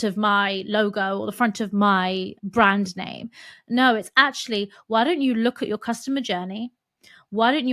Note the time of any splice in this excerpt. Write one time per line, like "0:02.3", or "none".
0:02.3